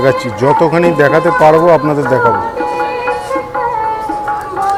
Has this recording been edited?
no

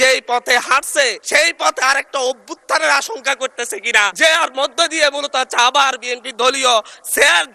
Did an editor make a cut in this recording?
yes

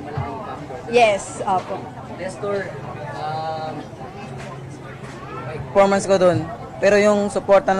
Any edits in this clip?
no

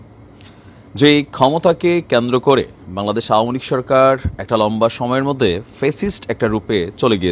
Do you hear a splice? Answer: no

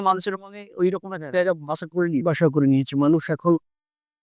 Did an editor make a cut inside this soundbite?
no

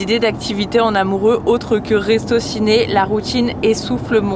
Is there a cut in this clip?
no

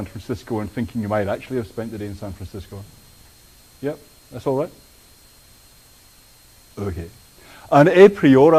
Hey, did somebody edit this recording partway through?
no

